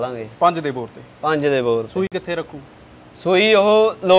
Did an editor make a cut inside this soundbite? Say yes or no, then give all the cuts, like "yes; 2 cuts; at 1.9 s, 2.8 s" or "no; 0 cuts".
no; 0 cuts